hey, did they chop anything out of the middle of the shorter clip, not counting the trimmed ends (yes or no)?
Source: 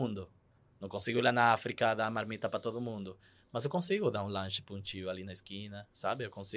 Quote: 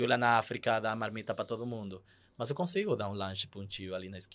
no